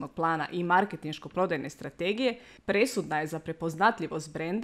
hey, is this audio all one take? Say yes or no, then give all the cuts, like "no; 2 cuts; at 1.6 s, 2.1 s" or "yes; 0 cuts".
no; 1 cut; at 2.5 s